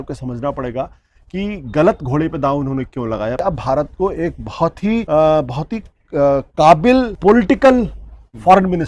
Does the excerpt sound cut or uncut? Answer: cut